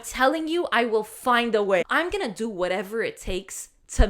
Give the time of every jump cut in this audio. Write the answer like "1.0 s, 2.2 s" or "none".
1.8 s